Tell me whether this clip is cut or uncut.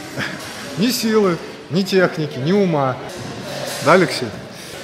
cut